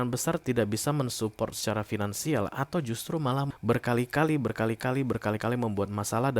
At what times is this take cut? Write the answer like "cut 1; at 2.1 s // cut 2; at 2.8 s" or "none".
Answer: cut 1; at 3.5 s